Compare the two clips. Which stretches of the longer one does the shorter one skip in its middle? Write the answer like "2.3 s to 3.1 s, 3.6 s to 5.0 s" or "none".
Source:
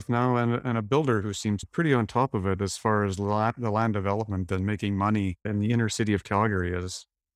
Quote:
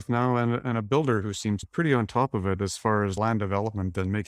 3.2 s to 3.7 s